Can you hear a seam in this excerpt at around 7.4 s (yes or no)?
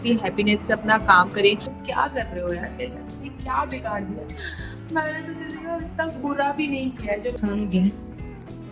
yes